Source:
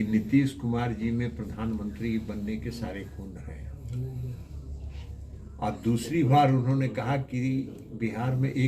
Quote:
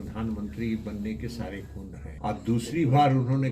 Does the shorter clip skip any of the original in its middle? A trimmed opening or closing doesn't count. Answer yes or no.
yes